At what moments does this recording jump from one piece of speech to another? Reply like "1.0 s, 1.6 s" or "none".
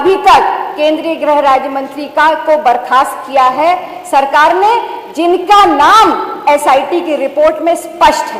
none